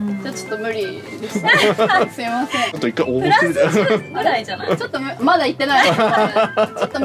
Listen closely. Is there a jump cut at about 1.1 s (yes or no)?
no